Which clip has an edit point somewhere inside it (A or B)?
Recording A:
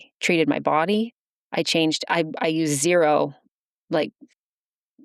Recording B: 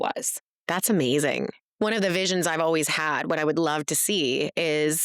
B